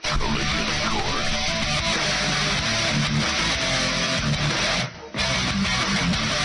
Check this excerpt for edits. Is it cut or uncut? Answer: uncut